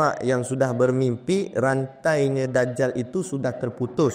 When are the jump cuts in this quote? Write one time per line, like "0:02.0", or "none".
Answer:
none